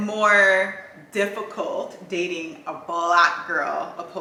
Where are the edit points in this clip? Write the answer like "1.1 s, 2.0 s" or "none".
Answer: none

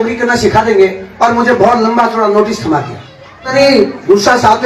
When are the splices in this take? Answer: 3.5 s

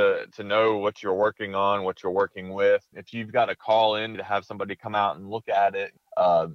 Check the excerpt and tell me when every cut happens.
4.2 s

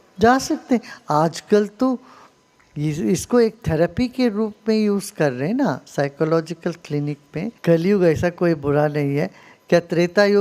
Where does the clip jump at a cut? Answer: 7.5 s

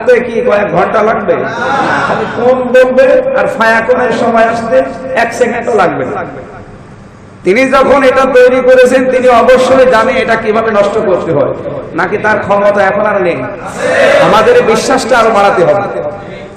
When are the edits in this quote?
none

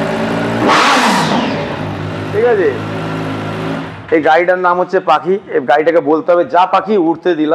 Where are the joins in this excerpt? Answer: none

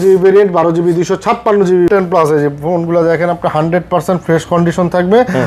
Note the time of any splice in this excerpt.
1.9 s

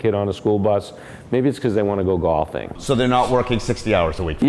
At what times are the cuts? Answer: none

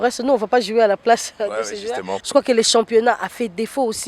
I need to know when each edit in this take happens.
2.2 s

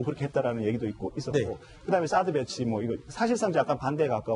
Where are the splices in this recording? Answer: 1.2 s

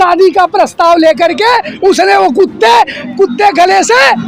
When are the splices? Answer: 3.0 s

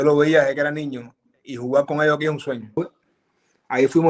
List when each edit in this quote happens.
2.8 s

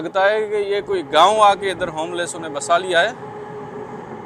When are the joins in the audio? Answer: none

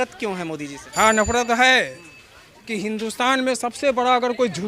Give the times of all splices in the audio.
none

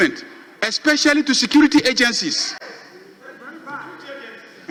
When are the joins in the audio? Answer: none

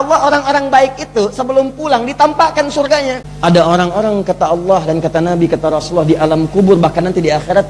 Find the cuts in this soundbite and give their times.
3.3 s

